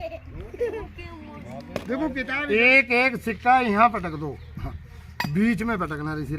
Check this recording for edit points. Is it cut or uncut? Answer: cut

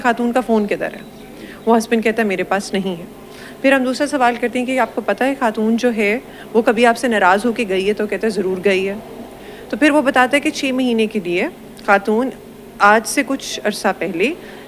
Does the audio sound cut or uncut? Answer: uncut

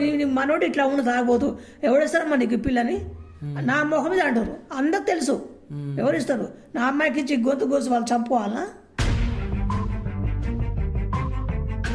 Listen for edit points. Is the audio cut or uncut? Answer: uncut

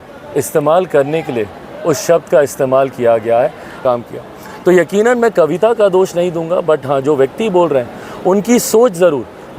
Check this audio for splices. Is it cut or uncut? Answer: cut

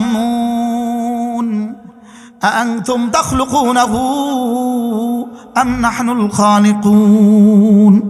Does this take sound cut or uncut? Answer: uncut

